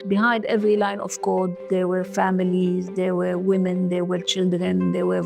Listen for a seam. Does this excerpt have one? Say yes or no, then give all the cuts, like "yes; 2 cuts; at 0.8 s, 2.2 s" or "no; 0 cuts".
no; 0 cuts